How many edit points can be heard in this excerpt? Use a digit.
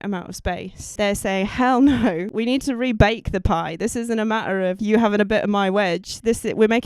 3